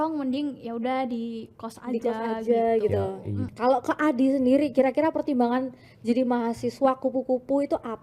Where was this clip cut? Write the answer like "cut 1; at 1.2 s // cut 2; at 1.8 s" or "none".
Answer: cut 1; at 3.5 s